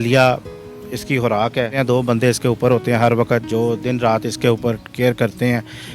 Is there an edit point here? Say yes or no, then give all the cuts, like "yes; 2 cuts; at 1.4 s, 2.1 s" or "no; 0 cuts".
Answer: yes; 1 cut; at 1.7 s